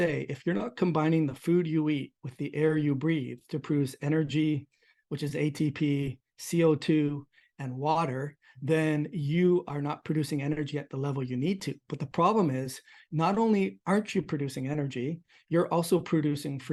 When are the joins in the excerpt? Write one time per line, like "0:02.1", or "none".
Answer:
none